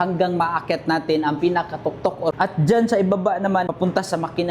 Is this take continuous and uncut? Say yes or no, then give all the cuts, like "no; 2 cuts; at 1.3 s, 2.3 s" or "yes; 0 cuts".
no; 2 cuts; at 2.4 s, 3.7 s